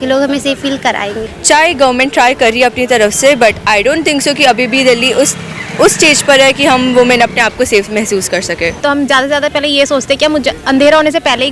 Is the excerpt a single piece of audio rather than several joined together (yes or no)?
no